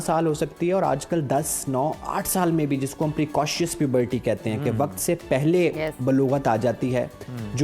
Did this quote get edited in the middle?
no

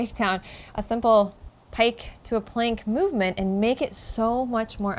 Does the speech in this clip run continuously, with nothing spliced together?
yes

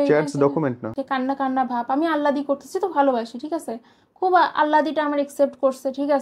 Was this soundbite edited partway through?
yes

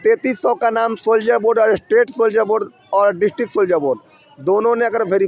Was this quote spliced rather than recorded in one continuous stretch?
no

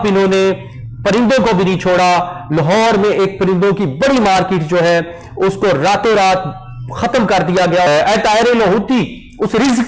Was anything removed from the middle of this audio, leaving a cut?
yes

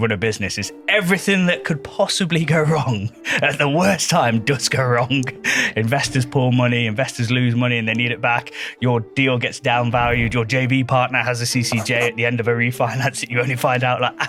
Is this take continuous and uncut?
yes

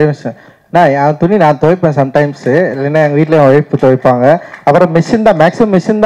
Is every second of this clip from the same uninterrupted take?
yes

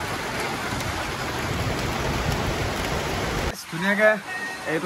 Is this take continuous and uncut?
no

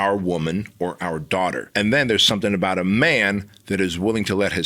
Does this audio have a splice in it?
yes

